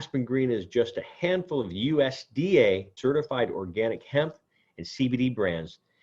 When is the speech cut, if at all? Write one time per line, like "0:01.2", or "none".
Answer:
0:02.9